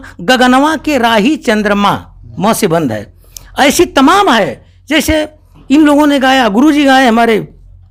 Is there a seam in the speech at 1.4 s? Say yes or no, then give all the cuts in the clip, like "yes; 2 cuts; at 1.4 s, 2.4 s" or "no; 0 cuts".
no; 0 cuts